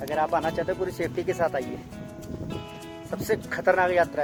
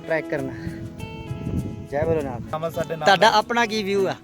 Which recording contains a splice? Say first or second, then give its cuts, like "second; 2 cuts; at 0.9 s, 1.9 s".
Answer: second; 1 cut; at 2.6 s